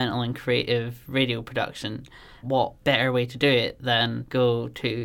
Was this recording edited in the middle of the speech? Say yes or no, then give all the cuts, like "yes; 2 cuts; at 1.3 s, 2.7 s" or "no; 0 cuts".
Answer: yes; 2 cuts; at 2.3 s, 4.2 s